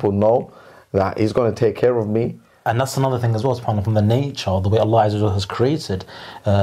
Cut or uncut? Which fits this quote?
cut